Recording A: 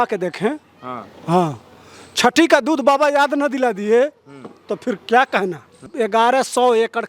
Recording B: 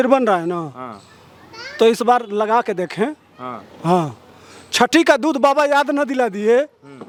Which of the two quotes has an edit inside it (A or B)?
A